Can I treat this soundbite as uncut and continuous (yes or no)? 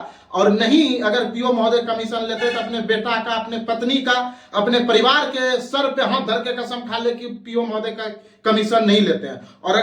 yes